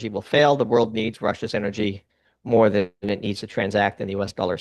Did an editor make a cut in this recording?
no; 0 cuts

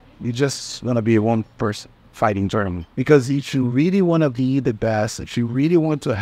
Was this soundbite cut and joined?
yes; 1 cut; at 2.8 s

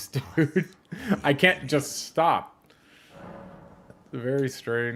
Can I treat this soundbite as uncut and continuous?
yes; 0 cuts

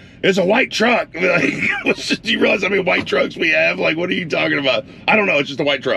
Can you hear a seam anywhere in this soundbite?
no; 0 cuts

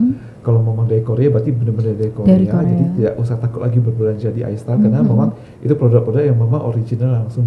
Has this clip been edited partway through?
no; 0 cuts

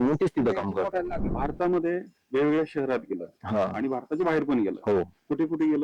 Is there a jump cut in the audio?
yes; 1 cut; at 1.2 s

